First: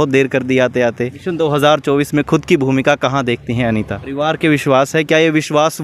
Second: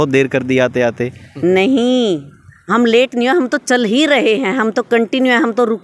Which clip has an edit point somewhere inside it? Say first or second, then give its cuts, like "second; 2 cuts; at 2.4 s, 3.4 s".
first; 2 cuts; at 1.2 s, 4.0 s